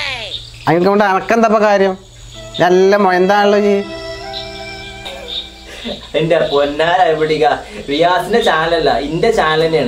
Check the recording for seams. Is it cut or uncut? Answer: uncut